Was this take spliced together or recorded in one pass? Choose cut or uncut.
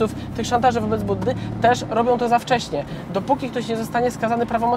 cut